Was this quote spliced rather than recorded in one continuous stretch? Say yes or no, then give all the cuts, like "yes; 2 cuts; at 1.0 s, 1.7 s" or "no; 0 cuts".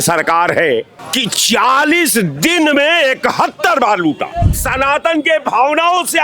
yes; 2 cuts; at 1.0 s, 4.6 s